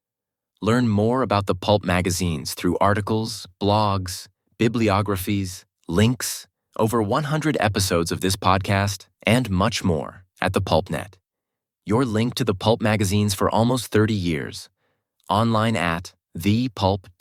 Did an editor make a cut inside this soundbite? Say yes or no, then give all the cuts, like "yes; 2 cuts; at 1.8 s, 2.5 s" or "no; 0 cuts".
no; 0 cuts